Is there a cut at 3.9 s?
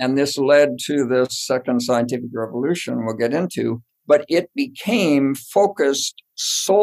yes; 1 cut; at 3.9 s

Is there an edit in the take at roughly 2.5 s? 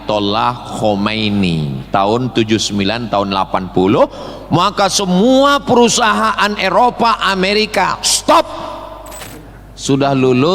no; 1 cut; at 9.2 s

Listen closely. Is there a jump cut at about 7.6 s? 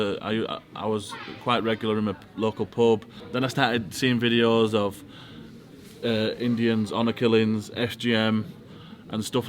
no; 1 cut; at 3.2 s

